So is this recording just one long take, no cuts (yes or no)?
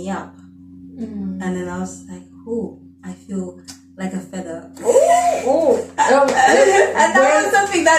yes